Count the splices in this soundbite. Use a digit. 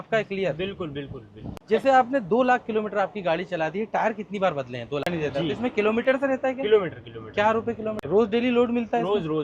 3